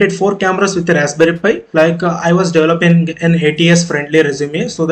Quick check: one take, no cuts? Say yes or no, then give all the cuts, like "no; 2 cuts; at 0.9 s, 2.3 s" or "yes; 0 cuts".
no; 1 cut; at 1.6 s